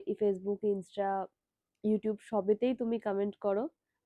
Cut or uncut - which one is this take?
uncut